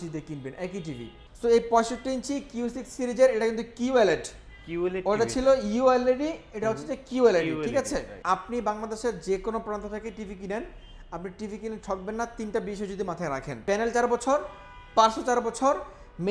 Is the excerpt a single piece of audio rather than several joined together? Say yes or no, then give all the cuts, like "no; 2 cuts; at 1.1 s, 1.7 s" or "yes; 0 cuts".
no; 3 cuts; at 1.3 s, 8.1 s, 13.5 s